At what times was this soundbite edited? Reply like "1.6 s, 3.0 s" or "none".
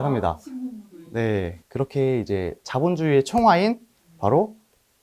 1.6 s